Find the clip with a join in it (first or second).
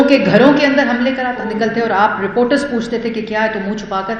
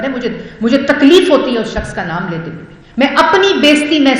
first